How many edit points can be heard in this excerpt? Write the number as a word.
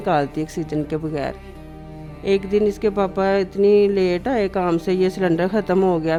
zero